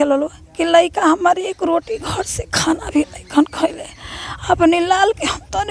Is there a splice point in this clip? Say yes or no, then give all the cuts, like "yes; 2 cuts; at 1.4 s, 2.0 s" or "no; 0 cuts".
no; 0 cuts